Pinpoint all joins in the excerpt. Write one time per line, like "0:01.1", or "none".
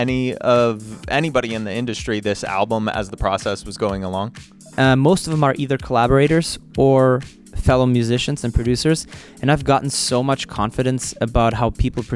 0:04.6